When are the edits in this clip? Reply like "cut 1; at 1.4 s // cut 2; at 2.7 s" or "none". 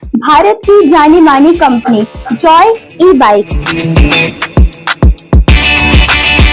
none